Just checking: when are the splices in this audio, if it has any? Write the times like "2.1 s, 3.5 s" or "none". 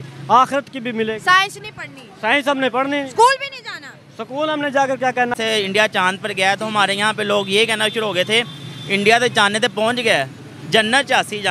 5.3 s